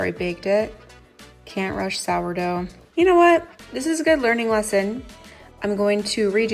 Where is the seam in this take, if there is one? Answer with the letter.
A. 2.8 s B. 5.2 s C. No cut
A